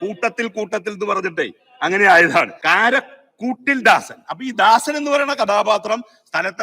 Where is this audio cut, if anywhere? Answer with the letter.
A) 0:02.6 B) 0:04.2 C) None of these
A